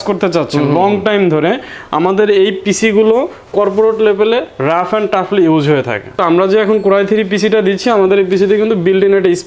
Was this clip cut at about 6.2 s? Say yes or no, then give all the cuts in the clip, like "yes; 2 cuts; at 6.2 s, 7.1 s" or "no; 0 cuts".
yes; 1 cut; at 6.2 s